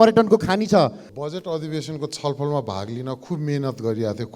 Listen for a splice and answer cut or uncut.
cut